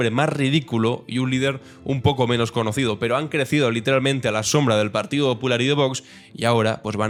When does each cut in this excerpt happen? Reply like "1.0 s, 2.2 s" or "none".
none

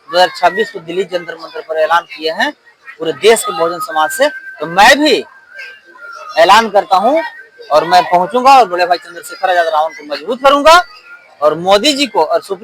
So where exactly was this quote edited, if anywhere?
none

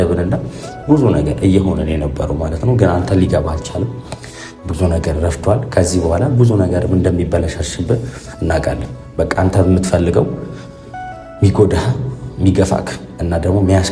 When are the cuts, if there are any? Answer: none

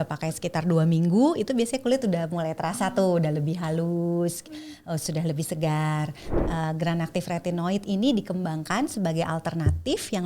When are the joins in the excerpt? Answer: 6.3 s

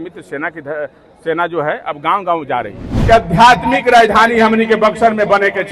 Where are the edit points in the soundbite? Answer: 2.9 s

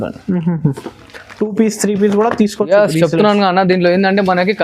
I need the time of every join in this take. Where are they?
none

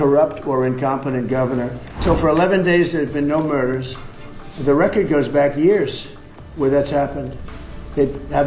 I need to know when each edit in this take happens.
1.8 s

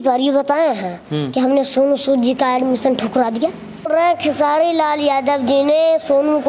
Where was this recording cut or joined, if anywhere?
3.9 s

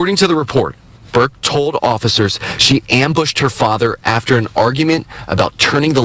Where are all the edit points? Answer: 4.9 s

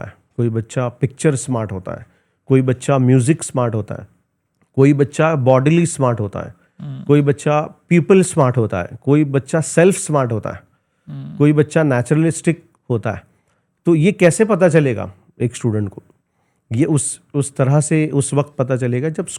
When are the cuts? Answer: none

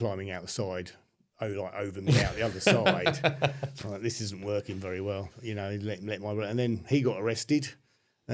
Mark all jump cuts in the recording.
none

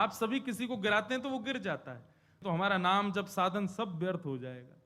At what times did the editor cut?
2.4 s

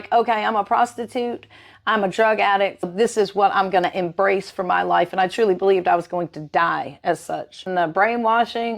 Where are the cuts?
2.9 s, 7.6 s

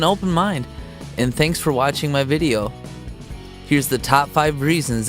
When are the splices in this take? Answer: 1.6 s

